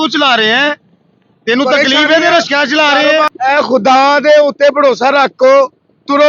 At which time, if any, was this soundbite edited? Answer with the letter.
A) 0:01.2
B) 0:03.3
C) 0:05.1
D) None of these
B